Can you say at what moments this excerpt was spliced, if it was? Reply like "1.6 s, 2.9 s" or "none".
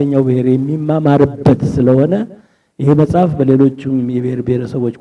none